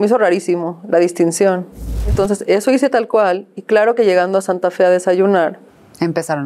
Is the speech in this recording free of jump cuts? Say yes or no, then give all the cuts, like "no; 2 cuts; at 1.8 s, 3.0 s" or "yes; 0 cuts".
no; 1 cut; at 2.1 s